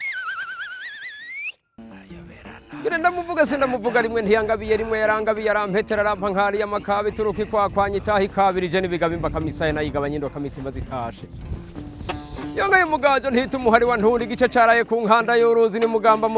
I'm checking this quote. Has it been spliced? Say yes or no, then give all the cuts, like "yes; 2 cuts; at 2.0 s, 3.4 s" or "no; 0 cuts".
yes; 1 cut; at 1.8 s